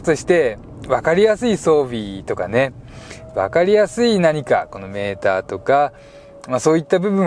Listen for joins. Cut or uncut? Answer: uncut